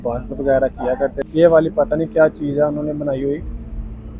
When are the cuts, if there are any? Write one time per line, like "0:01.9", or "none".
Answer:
0:01.3